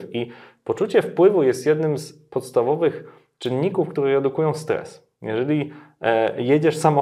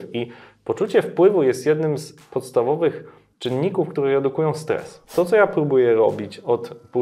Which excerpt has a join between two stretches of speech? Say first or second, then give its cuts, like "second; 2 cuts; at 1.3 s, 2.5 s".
second; 1 cut; at 5.1 s